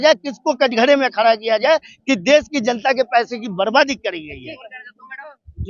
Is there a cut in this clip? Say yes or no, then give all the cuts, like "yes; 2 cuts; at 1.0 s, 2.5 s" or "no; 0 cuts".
no; 0 cuts